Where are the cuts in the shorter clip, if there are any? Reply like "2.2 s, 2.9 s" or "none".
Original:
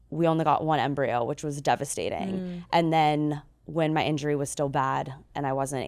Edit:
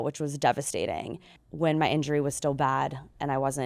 1.3 s